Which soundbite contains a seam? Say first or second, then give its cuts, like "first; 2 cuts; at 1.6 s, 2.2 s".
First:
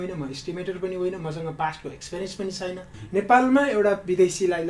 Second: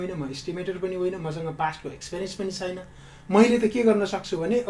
first; 1 cut; at 2.9 s